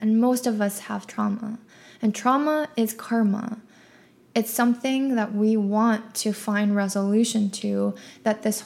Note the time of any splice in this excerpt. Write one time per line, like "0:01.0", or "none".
none